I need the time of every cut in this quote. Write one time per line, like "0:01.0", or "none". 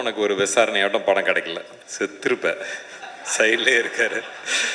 0:01.8